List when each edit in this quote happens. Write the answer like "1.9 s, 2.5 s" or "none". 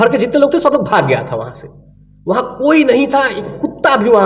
none